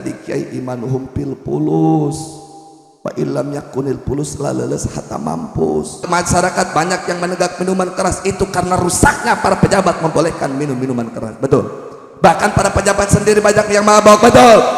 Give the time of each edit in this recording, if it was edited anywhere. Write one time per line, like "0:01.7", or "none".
0:06.0